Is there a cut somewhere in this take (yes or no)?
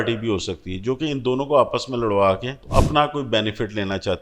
yes